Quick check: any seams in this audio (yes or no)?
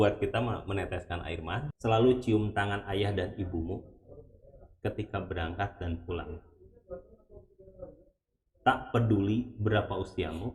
yes